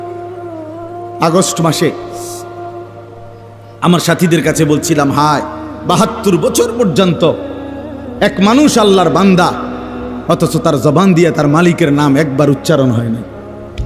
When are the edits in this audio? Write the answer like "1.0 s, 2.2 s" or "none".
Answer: none